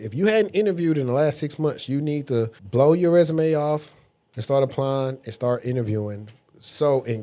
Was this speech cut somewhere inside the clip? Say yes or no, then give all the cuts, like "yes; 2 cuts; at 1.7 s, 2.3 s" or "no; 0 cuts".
yes; 1 cut; at 2.6 s